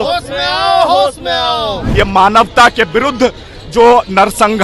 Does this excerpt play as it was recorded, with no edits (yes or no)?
no